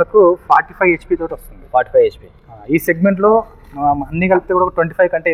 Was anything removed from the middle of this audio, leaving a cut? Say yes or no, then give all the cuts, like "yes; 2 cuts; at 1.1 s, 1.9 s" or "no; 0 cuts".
no; 0 cuts